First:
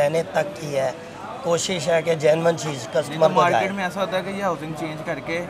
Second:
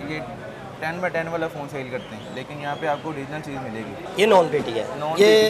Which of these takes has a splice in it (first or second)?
second